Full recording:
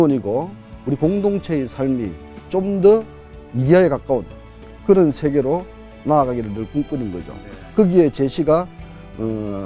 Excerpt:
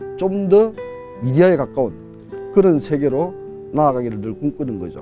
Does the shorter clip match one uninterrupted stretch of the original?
yes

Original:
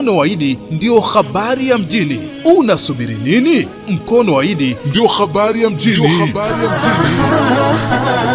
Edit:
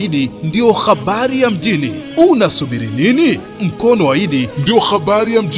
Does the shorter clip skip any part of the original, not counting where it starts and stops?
no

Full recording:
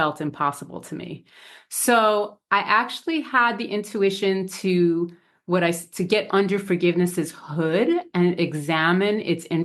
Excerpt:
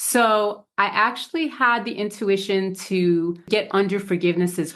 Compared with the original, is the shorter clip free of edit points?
no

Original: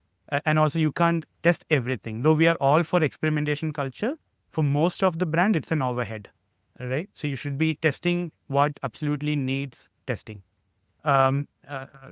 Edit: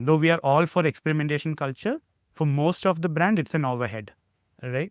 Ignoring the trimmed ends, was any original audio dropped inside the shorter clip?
no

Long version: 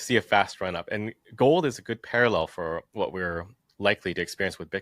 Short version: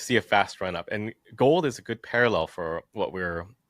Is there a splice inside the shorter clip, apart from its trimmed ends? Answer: no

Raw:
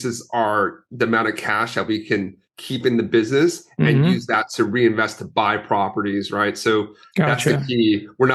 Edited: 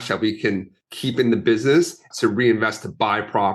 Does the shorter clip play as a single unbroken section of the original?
no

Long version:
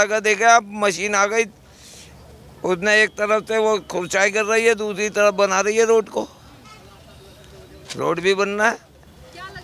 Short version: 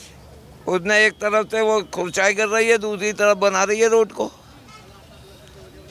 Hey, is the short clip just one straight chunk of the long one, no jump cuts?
yes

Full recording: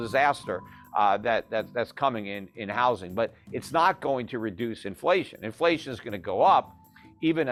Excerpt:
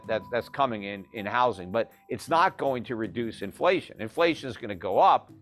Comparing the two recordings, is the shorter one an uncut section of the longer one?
yes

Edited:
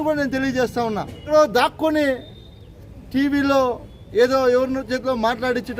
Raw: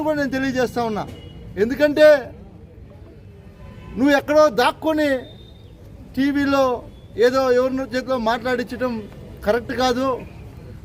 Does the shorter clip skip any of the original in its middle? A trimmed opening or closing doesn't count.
yes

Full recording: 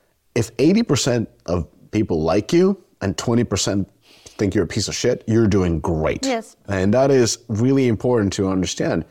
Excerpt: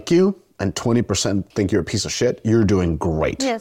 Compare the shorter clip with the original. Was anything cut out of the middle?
yes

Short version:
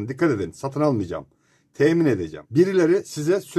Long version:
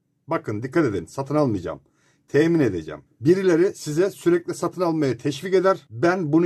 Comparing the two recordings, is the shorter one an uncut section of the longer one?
no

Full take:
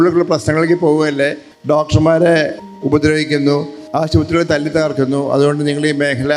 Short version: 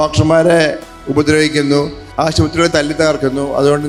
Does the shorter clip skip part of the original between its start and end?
no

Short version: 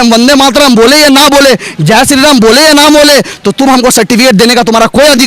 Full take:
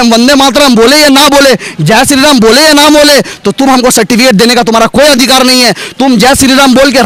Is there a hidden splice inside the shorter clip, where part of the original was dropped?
no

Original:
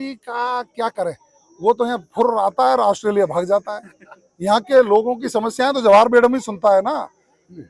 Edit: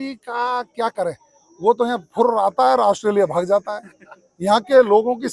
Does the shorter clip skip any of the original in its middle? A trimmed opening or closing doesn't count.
no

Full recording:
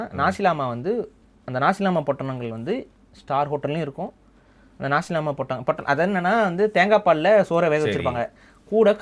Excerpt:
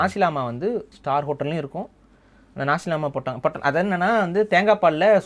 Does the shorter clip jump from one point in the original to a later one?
yes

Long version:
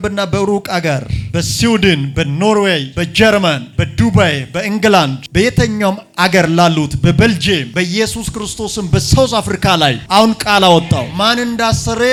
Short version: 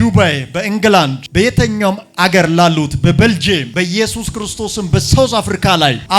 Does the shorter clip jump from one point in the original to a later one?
no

